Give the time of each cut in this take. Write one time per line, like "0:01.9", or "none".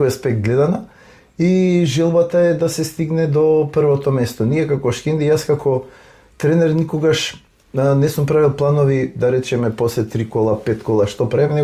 none